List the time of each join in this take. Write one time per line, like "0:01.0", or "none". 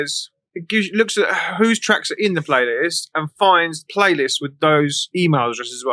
0:03.8
0:05.0